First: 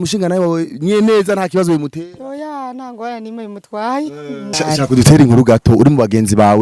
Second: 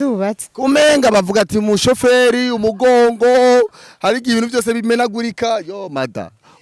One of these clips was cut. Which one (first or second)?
first